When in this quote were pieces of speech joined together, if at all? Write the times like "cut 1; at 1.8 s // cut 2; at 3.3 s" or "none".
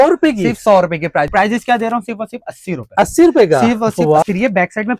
cut 1; at 1.3 s // cut 2; at 4.2 s

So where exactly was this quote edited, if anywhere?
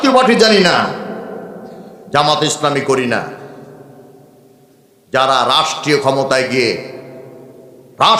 none

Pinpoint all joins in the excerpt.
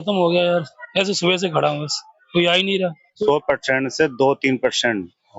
cut 1; at 3.1 s

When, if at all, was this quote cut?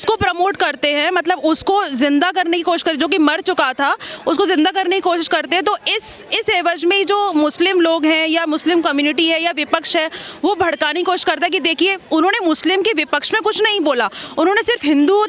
none

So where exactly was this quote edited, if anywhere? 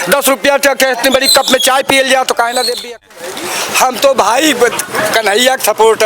cut 1; at 2.8 s

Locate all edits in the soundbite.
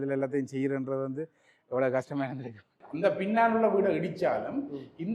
cut 1; at 2.7 s

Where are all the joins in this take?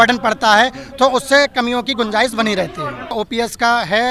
cut 1; at 3.1 s

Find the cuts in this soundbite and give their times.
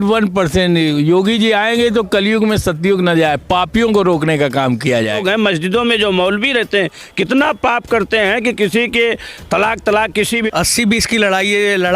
cut 1; at 5.2 s // cut 2; at 10.5 s

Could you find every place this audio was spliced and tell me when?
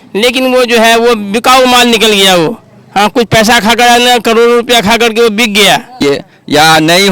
cut 1; at 6.0 s

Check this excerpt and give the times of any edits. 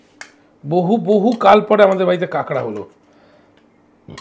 none

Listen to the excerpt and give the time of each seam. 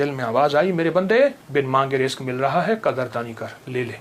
cut 1; at 1.4 s

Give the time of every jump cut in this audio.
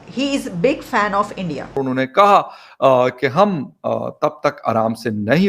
cut 1; at 1.8 s

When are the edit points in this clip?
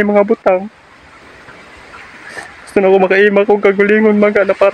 cut 1; at 2.0 s

